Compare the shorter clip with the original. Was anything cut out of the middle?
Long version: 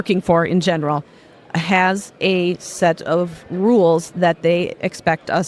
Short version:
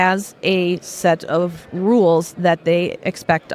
no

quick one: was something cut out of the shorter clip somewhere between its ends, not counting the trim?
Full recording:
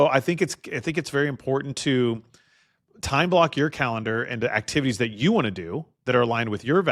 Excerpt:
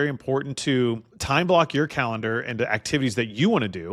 yes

